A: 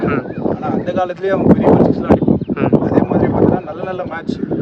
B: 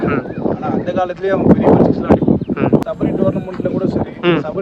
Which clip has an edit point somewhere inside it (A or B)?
B